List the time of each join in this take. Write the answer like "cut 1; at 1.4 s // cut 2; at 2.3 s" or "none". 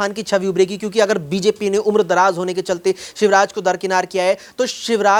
none